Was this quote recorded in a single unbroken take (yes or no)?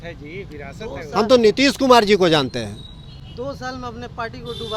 yes